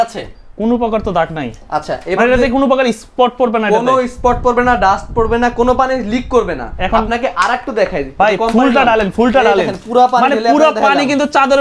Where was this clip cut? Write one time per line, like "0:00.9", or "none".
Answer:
none